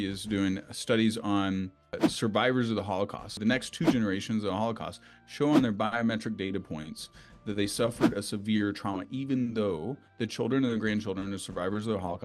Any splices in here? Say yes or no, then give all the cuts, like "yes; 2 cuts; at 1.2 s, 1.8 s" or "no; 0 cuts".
yes; 2 cuts; at 2.0 s, 3.5 s